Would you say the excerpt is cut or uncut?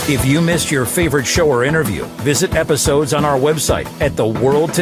uncut